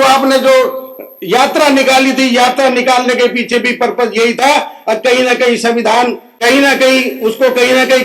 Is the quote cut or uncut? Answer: uncut